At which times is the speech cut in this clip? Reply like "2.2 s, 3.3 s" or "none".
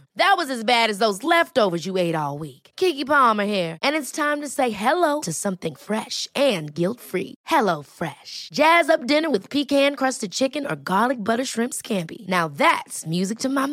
none